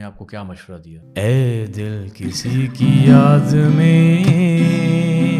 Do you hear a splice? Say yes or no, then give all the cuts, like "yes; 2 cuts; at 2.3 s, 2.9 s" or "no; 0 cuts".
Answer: yes; 1 cut; at 1.0 s